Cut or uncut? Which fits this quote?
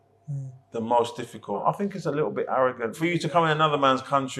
cut